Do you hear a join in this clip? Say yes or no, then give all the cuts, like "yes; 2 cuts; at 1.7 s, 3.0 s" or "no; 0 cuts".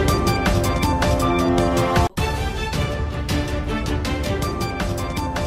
no; 0 cuts